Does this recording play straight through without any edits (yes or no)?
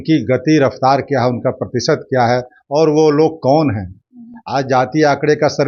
yes